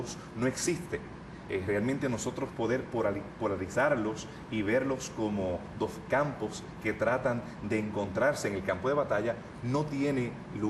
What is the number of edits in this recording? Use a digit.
0